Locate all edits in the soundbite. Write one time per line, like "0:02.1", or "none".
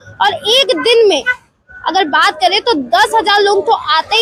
none